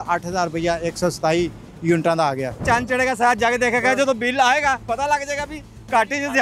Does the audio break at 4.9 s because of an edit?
no; 1 cut; at 2.6 s

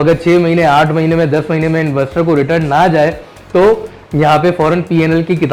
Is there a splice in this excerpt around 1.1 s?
no; 0 cuts

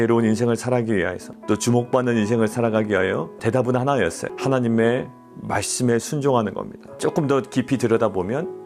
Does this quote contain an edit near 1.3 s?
yes; 4 cuts; at 1.3 s, 3.3 s, 4.3 s, 7.0 s

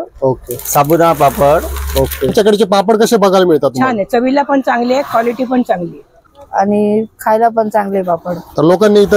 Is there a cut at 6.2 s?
yes; 2 cuts; at 2.3 s, 6.2 s

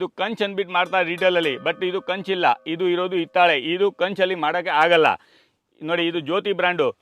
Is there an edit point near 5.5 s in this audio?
no; 0 cuts

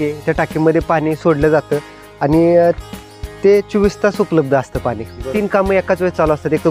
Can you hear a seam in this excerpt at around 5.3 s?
yes; 1 cut; at 5.3 s

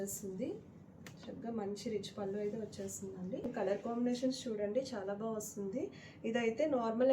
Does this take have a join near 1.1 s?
no; 1 cut; at 3.5 s

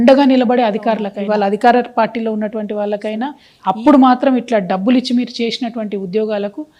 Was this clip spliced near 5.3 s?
no; 2 cuts; at 1.1 s, 3.5 s

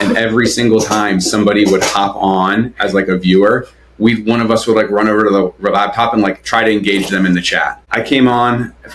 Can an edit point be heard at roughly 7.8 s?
yes; 1 cut; at 7.8 s

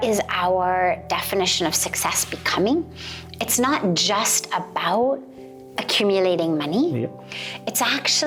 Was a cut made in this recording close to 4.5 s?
no; 0 cuts

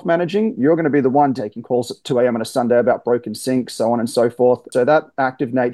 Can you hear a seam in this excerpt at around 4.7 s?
yes; 2 cuts; at 1.4 s, 4.7 s

